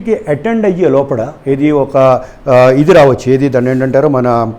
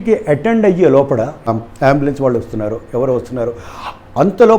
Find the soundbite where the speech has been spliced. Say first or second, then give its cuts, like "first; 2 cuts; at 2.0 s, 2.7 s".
second; 1 cut; at 1.5 s